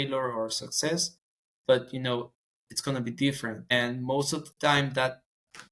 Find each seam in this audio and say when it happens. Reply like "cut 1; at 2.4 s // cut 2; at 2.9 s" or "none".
cut 1; at 3.6 s